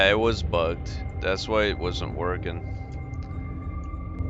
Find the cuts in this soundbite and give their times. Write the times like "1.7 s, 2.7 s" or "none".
none